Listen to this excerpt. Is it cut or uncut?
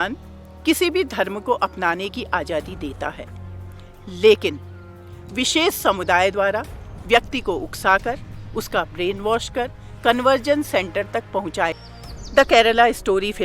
cut